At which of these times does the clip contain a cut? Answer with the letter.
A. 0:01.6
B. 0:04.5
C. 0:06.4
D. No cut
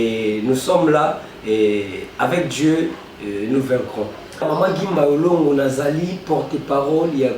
B